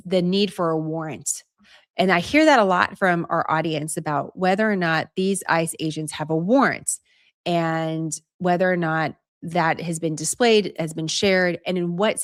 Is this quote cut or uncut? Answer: uncut